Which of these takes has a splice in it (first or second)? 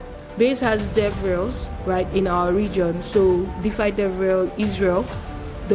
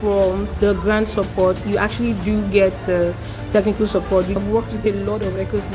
second